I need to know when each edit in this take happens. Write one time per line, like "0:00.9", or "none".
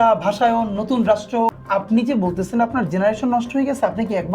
0:01.6